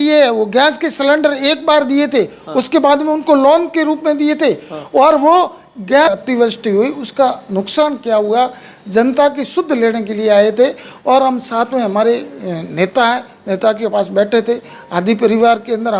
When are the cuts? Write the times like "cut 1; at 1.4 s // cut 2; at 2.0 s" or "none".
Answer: cut 1; at 6.1 s

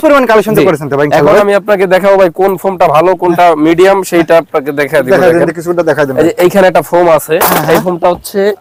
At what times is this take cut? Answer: none

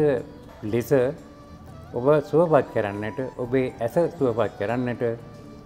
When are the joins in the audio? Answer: none

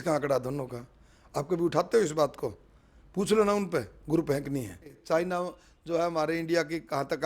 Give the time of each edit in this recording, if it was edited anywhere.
cut 1; at 5.0 s

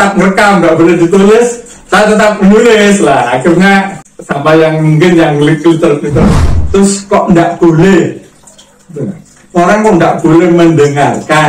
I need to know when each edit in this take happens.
cut 1; at 6.3 s

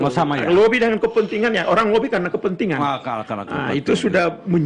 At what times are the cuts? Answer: none

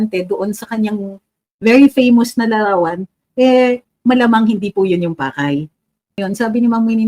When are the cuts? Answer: cut 1; at 6.2 s

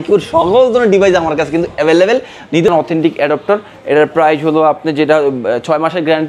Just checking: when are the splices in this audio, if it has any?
cut 1; at 2.7 s

